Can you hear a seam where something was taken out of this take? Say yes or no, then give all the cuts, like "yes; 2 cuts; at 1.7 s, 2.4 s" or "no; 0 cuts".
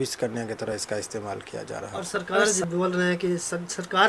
yes; 1 cut; at 2.1 s